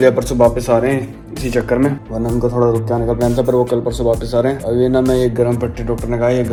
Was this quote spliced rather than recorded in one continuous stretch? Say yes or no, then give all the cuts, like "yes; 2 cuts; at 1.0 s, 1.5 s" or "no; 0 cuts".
no; 0 cuts